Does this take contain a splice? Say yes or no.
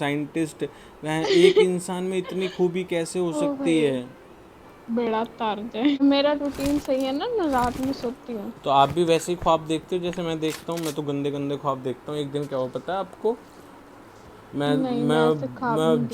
yes